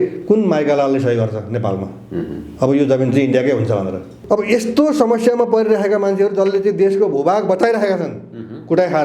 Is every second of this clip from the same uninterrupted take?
no; 1 cut; at 4.2 s

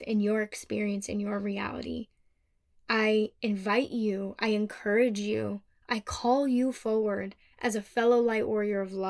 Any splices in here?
no; 0 cuts

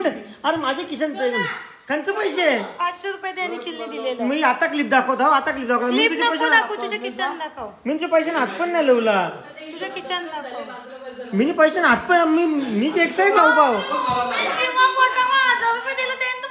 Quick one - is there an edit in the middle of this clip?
no; 0 cuts

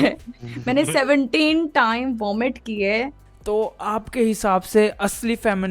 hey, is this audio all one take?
no; 1 cut; at 3.2 s

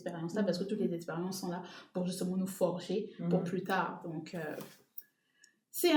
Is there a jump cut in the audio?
no; 0 cuts

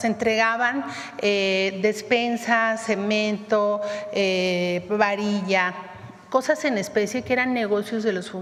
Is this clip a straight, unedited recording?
yes; 0 cuts

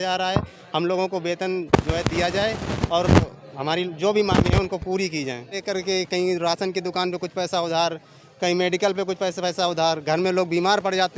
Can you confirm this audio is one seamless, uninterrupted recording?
no; 1 cut; at 5.6 s

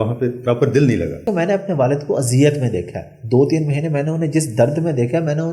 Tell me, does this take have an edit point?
yes; 1 cut; at 1.2 s

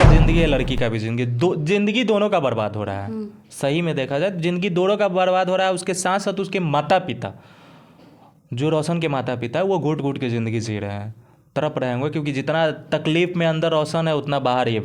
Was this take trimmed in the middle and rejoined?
no; 0 cuts

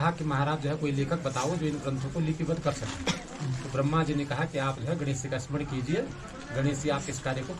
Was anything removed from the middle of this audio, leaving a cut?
no; 0 cuts

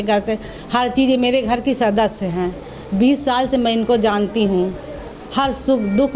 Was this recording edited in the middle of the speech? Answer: no; 0 cuts

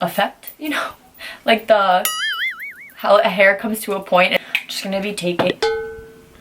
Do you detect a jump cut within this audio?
yes; 1 cut; at 4.3 s

